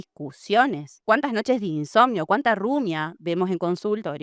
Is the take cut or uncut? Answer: uncut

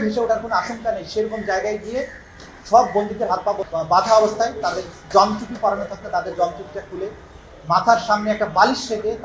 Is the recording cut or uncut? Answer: cut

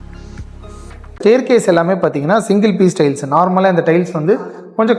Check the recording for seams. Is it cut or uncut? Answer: cut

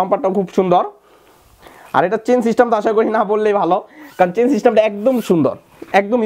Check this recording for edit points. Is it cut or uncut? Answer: uncut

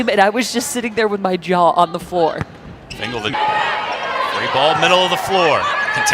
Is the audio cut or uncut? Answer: cut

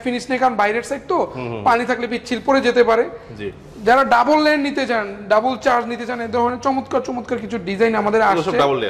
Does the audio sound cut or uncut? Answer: uncut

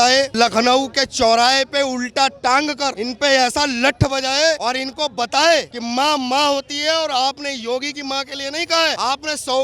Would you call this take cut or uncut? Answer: uncut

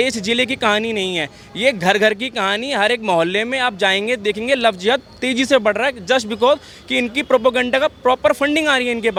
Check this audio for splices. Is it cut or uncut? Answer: uncut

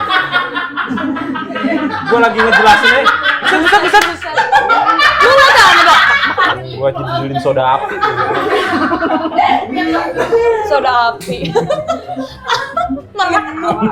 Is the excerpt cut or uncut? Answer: uncut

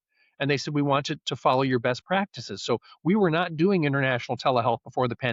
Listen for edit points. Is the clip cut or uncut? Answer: uncut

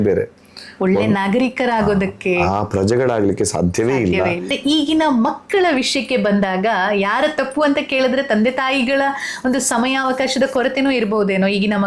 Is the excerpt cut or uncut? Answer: cut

